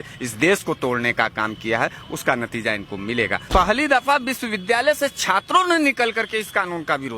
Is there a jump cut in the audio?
yes; 1 cut; at 3.4 s

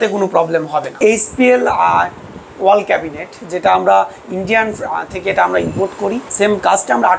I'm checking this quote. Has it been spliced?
yes; 2 cuts; at 1.0 s, 6.3 s

